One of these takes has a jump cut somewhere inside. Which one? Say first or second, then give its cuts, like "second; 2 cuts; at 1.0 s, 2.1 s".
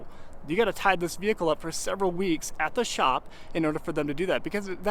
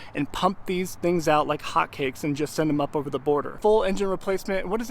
second; 1 cut; at 3.5 s